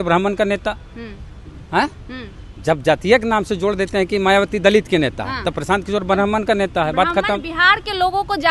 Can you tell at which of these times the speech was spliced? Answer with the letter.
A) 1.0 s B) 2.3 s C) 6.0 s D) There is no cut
D